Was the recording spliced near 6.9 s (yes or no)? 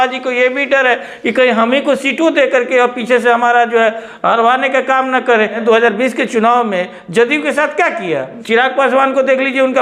no